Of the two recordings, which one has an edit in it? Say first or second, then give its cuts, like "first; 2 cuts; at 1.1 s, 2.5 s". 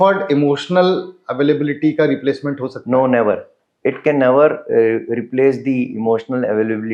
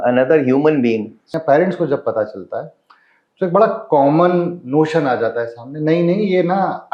second; 1 cut; at 1.3 s